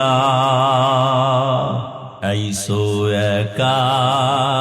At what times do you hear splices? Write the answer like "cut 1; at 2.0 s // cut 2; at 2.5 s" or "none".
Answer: cut 1; at 2.0 s